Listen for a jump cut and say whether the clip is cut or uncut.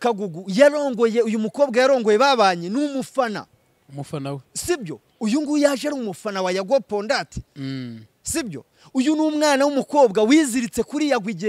uncut